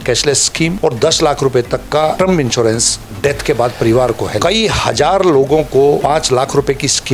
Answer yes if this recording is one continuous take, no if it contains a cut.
no